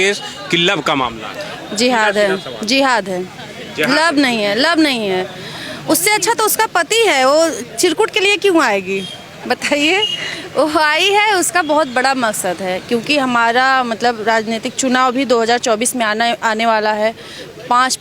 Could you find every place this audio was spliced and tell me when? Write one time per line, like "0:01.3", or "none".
none